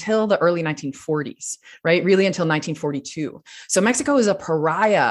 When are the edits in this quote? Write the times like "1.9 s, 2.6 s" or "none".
none

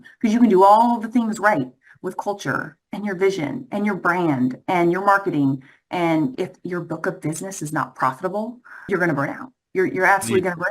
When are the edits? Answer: 6.3 s, 8.9 s

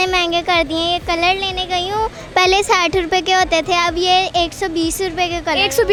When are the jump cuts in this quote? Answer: none

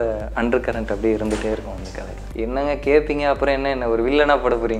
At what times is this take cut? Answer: 2.2 s

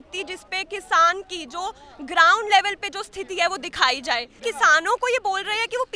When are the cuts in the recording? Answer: 4.4 s

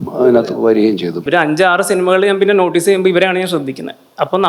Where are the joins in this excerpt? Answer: 1.2 s

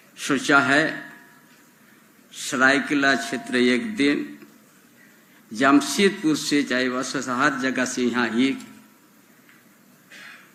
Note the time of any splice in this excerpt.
none

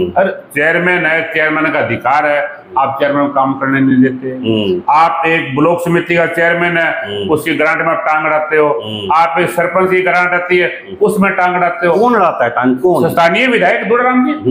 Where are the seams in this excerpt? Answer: none

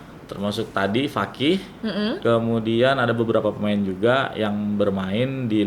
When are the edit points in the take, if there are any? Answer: 2.2 s

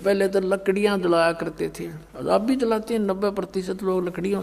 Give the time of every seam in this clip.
none

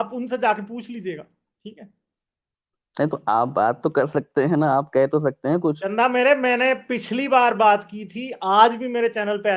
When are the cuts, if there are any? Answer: none

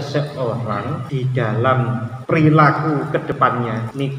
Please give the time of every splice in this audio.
1.0 s, 2.1 s, 3.4 s

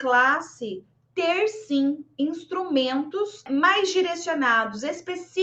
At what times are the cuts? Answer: 3.4 s

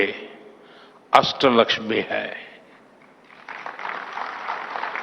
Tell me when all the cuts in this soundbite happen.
2.1 s

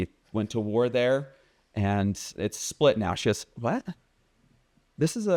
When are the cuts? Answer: none

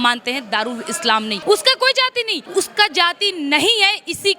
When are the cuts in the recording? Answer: 1.3 s, 2.4 s

